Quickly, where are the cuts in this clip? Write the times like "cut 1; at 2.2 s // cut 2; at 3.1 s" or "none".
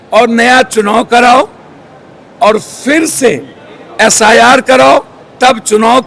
none